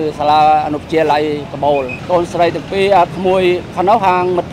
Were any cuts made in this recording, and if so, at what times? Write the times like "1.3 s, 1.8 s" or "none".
2.0 s